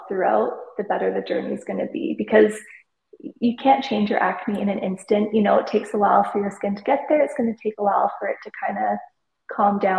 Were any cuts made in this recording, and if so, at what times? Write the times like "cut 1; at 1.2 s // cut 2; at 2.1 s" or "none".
none